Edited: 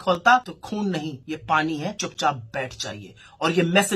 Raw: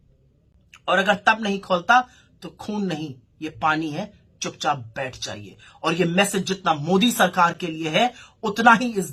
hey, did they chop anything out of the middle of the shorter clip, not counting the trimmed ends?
yes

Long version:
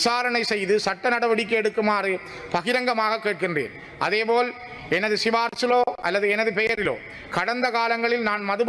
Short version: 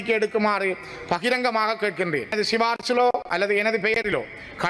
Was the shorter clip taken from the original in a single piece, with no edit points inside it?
no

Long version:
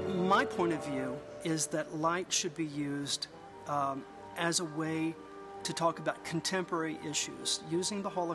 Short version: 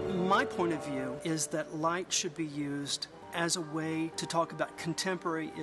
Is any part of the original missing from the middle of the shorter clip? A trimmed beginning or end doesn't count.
yes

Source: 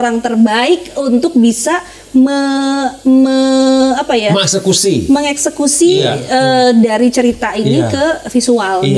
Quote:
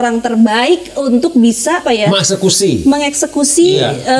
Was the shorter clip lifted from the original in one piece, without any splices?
no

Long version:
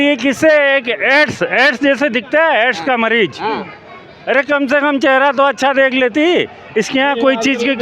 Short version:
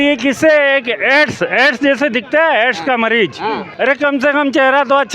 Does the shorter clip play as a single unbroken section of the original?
no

